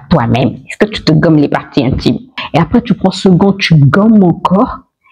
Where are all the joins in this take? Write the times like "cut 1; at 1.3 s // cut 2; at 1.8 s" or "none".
cut 1; at 2.4 s